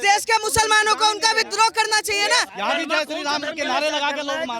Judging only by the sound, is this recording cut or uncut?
cut